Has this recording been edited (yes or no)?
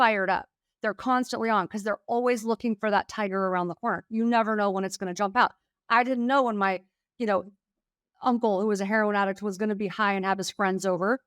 no